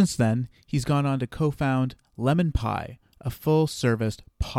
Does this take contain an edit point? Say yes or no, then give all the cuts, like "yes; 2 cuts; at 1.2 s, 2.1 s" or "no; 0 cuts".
no; 0 cuts